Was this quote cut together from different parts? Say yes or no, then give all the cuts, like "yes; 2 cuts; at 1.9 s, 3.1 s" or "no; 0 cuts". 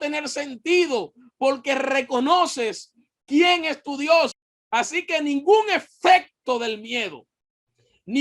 yes; 1 cut; at 4.3 s